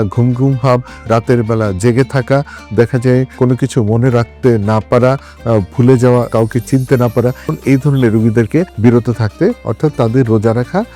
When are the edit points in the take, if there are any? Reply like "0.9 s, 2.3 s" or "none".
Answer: 7.5 s, 8.7 s